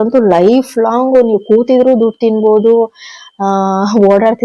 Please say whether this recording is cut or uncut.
uncut